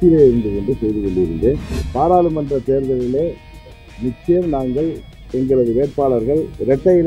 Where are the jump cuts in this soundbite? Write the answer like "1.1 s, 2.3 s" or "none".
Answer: 1.8 s

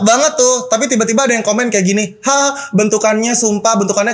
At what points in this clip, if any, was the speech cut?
none

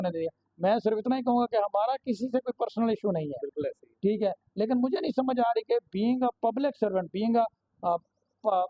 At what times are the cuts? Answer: none

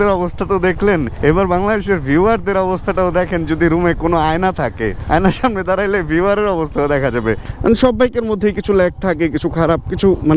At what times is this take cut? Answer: 7.4 s

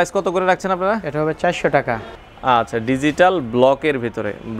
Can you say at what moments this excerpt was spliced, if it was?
2.2 s

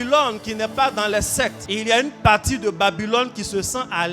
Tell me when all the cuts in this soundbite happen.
1.6 s

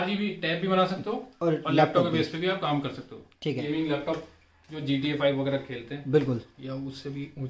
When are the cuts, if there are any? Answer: 3.6 s

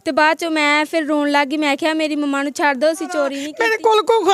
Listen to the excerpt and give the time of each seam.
3.4 s

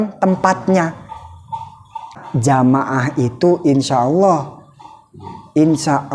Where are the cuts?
2.2 s

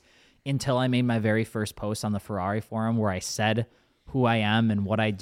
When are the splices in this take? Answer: none

